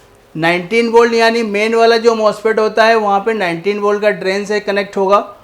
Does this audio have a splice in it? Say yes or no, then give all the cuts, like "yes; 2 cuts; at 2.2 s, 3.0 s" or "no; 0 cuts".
no; 0 cuts